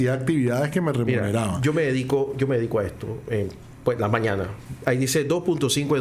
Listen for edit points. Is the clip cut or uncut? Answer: cut